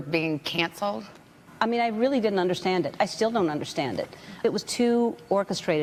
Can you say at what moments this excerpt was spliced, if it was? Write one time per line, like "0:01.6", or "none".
none